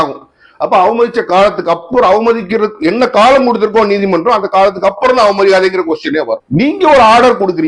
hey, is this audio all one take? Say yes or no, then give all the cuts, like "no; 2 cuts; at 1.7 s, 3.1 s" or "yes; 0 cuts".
no; 1 cut; at 6.4 s